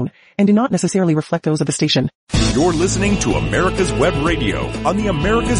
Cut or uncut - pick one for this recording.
cut